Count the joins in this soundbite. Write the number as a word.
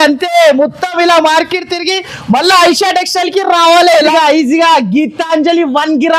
one